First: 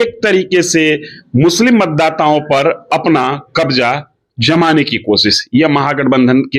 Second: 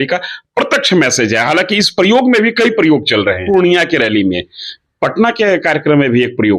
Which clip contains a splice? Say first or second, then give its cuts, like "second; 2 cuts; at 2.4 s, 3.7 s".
second; 1 cut; at 3.4 s